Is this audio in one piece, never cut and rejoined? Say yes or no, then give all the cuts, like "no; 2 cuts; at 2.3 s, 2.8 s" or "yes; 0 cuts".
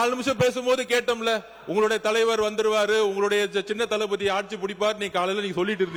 yes; 0 cuts